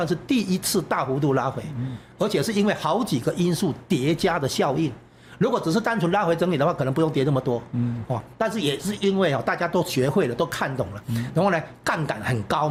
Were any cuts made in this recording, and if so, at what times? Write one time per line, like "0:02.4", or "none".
none